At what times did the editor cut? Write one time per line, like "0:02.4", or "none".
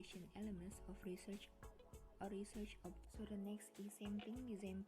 0:03.0